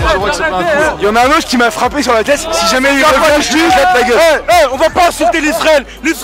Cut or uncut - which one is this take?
cut